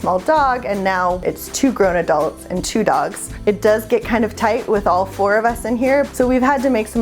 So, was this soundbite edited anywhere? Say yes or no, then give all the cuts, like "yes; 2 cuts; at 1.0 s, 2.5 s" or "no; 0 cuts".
yes; 3 cuts; at 1.2 s, 3.2 s, 6.1 s